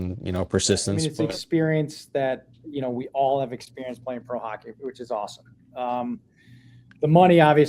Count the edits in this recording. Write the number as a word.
one